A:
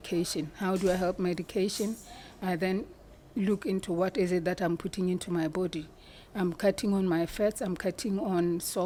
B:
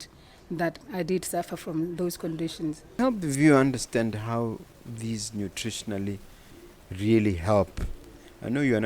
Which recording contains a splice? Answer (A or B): B